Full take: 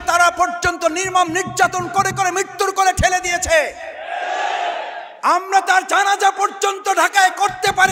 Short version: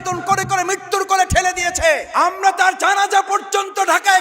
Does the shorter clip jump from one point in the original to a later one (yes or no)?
yes